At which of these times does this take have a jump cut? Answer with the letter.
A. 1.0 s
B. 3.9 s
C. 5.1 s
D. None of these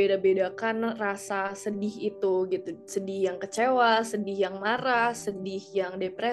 D